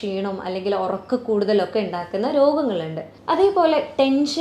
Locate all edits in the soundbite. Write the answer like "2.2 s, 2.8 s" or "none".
3.1 s